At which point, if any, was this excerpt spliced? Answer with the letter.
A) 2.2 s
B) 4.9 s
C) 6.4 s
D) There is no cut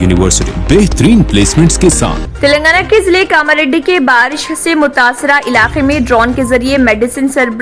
A